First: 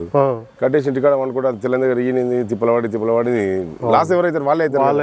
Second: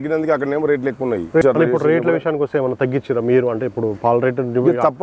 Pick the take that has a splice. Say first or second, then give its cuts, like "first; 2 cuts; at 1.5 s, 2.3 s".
second; 1 cut; at 1.4 s